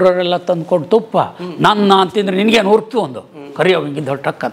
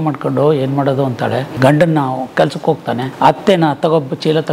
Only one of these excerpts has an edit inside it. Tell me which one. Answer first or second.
second